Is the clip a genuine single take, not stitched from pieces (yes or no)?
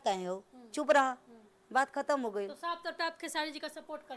yes